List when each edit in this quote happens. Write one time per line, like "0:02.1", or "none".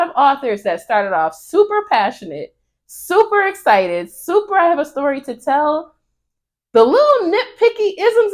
none